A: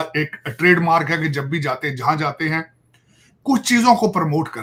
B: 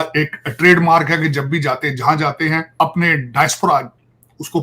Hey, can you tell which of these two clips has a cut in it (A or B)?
B